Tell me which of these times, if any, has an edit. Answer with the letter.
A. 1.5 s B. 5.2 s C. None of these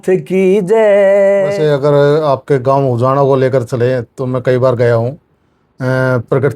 A